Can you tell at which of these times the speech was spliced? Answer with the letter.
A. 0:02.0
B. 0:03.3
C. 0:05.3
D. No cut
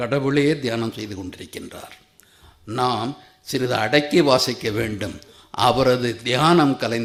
D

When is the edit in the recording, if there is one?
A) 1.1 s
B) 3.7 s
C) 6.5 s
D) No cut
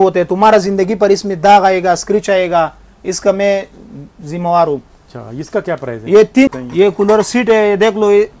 C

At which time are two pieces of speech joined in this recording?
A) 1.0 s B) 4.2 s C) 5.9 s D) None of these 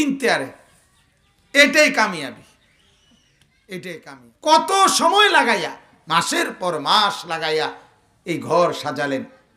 B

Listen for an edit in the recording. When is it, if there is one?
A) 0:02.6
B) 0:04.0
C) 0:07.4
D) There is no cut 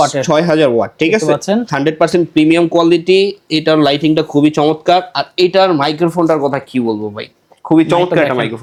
D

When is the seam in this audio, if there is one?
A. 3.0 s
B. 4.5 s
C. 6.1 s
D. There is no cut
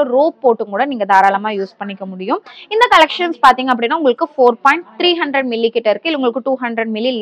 D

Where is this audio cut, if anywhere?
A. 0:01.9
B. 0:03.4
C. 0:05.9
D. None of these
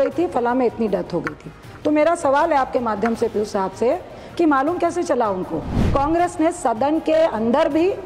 C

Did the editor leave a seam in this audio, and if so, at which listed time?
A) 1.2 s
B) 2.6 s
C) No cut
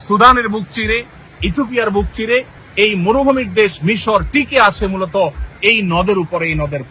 B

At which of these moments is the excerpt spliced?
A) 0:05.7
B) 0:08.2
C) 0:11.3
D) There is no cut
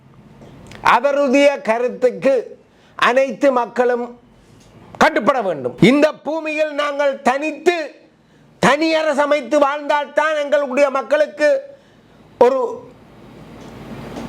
A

